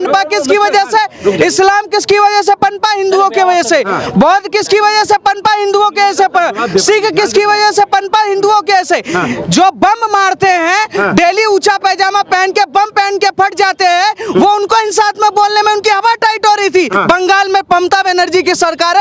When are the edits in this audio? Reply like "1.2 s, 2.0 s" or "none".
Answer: 16.9 s